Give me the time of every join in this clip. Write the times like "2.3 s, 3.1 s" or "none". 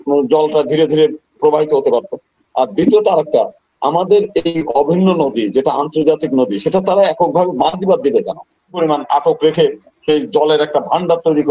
8.8 s